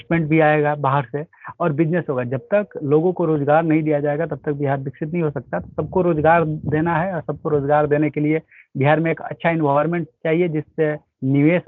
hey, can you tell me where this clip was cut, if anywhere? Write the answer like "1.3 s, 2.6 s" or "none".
none